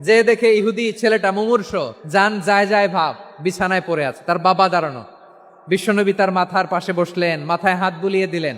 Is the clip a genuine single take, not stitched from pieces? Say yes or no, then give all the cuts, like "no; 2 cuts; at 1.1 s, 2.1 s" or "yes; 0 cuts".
no; 1 cut; at 2.0 s